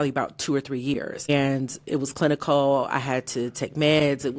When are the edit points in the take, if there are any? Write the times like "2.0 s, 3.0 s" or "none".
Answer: 1.3 s